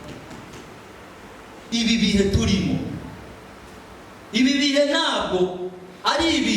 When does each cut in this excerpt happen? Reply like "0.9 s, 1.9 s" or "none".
1.6 s